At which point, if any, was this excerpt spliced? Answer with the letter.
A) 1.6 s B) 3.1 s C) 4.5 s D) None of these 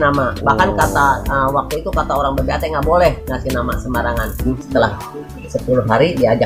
C